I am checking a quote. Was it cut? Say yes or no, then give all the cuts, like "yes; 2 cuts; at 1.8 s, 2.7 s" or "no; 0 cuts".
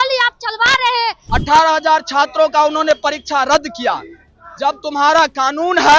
yes; 1 cut; at 1.3 s